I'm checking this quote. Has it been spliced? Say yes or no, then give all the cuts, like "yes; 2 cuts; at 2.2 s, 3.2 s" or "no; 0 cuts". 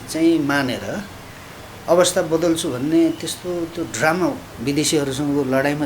yes; 1 cut; at 4.5 s